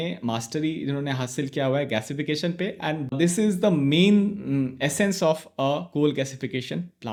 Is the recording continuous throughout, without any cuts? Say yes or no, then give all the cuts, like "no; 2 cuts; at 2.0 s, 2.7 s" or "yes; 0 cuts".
yes; 0 cuts